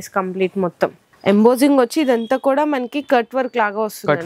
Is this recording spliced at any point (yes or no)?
yes